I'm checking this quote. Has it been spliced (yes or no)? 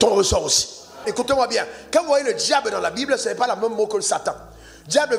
yes